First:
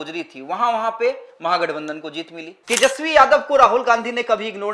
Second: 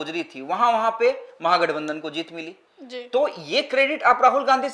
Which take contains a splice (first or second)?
first